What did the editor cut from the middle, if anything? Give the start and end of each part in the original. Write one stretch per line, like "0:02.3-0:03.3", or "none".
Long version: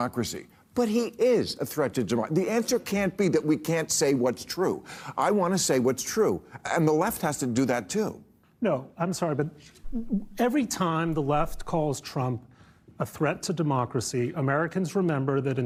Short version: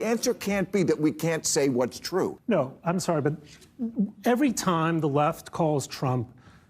0:04.8-0:08.5